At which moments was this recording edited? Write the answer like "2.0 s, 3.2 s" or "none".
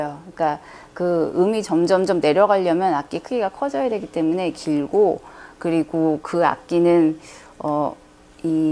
none